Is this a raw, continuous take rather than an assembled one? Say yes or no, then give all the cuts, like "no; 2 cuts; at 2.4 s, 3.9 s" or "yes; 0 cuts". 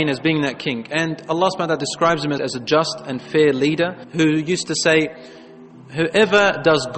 no; 1 cut; at 2.4 s